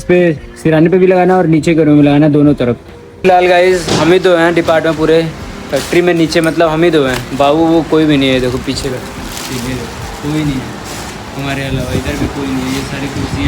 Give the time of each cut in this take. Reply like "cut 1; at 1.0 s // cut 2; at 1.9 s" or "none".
cut 1; at 3.2 s